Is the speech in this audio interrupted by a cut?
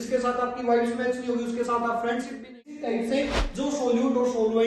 yes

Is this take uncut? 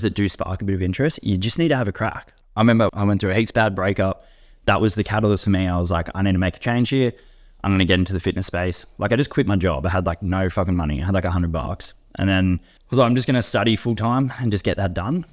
no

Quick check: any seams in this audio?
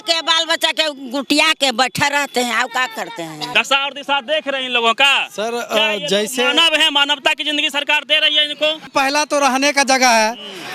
yes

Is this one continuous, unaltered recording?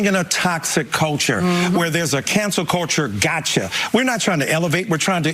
yes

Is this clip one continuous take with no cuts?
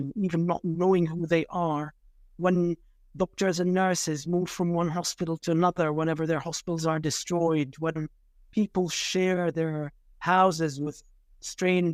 yes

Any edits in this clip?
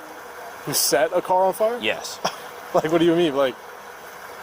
no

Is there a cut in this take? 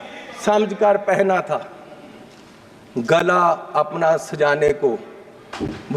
no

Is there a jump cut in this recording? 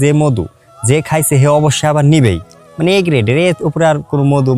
no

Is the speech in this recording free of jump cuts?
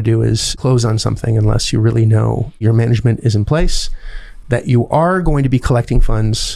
no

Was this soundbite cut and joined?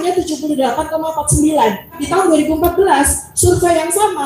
yes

